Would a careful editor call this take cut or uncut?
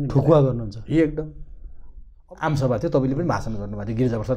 cut